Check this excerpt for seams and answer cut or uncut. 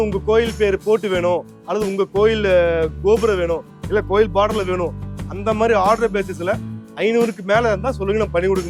uncut